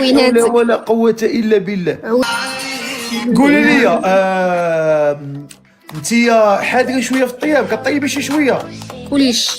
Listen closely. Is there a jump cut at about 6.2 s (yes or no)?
no